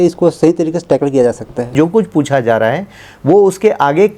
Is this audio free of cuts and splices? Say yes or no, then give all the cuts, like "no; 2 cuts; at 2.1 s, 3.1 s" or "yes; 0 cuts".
no; 1 cut; at 1.7 s